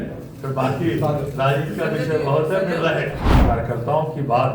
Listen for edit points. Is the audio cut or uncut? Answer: cut